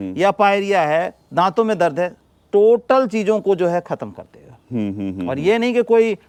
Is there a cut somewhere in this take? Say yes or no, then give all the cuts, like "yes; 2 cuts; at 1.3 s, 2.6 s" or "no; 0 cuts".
no; 0 cuts